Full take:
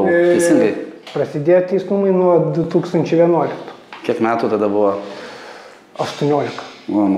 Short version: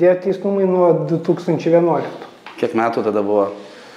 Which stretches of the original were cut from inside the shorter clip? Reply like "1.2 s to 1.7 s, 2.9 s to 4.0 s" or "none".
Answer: none